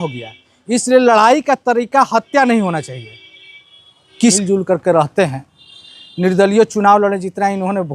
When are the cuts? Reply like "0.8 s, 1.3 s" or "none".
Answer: 4.4 s